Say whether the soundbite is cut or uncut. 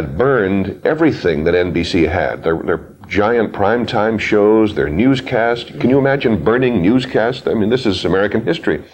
uncut